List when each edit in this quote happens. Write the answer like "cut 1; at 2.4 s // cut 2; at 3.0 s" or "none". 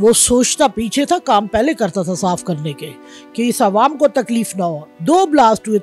cut 1; at 4.9 s